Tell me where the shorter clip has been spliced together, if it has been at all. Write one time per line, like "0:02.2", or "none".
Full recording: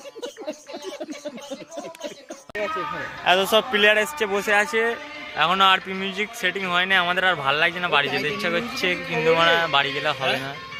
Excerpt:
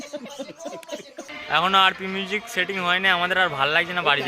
0:01.3